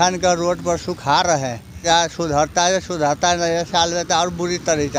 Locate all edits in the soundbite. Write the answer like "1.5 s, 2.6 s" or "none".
1.8 s